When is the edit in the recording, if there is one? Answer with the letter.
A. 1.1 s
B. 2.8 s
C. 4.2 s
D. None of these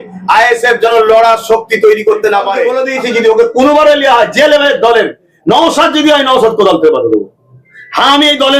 B